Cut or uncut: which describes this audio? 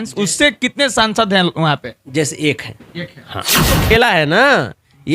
cut